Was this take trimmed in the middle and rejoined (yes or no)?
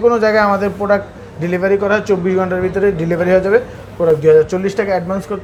no